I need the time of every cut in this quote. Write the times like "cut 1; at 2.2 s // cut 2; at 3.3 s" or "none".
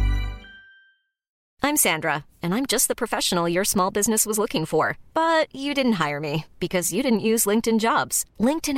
cut 1; at 1.3 s

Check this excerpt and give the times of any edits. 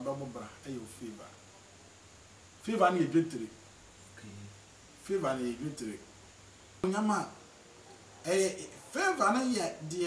cut 1; at 6.8 s

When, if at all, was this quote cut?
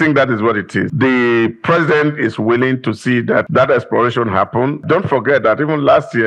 cut 1; at 0.9 s // cut 2; at 3.5 s // cut 3; at 4.8 s

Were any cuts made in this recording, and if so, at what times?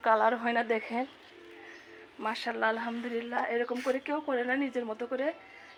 none

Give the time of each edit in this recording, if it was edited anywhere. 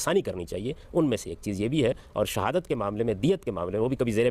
none

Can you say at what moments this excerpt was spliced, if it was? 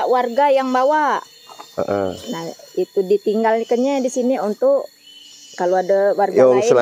none

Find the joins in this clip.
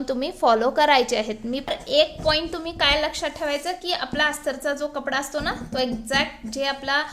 cut 1; at 1.7 s

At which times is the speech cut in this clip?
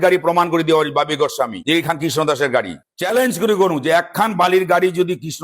cut 1; at 1.6 s // cut 2; at 2.8 s

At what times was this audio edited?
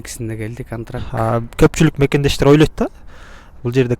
cut 1; at 1.1 s

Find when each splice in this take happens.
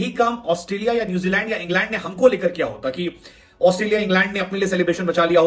none

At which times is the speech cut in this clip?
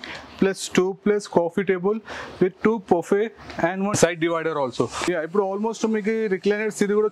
cut 1; at 3.9 s // cut 2; at 5.0 s

